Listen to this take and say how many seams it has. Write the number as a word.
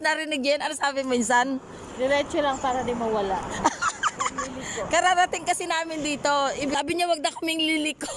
one